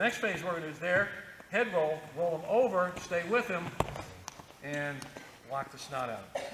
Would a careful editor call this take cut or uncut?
uncut